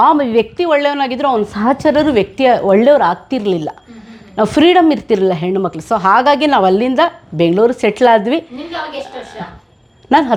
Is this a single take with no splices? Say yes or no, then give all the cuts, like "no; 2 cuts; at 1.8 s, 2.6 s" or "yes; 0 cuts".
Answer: yes; 0 cuts